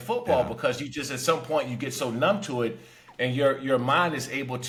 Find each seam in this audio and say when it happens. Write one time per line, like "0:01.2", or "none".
none